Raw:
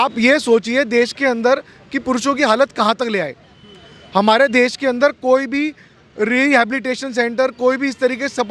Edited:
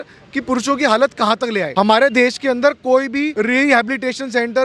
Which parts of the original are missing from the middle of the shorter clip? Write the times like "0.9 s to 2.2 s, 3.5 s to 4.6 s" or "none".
3.3 s to 4.1 s, 5.7 s to 6.1 s